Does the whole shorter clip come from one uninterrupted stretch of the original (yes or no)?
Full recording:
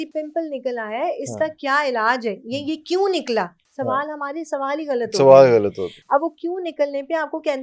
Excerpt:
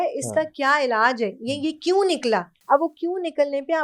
no